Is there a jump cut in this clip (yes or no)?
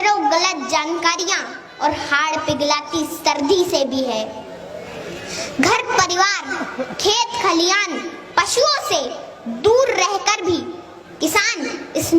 no